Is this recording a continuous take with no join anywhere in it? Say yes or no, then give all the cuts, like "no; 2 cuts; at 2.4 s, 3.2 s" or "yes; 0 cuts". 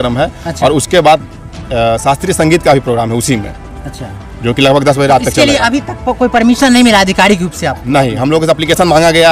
yes; 0 cuts